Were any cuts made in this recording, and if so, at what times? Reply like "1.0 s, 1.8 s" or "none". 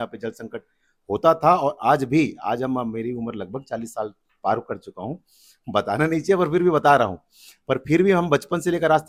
none